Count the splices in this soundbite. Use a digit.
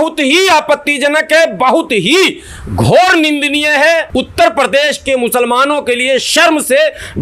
1